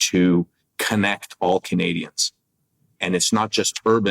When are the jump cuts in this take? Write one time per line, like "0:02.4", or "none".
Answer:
0:03.0